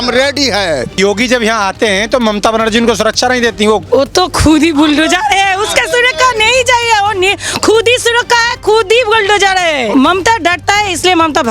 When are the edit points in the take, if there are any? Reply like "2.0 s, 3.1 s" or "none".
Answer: 0.9 s, 3.8 s, 9.9 s